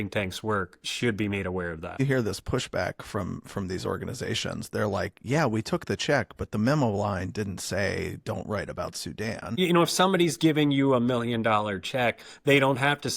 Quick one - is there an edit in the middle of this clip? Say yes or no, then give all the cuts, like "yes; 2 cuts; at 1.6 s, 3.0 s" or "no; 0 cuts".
yes; 2 cuts; at 2.0 s, 9.6 s